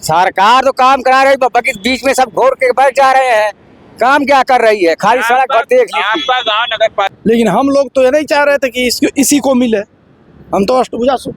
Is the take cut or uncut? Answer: cut